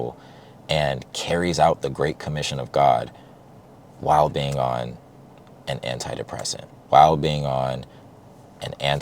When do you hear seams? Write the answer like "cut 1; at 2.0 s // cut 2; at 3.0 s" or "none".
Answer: cut 1; at 6.7 s